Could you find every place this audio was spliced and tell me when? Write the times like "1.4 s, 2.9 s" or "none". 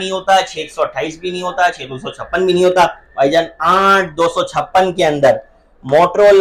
none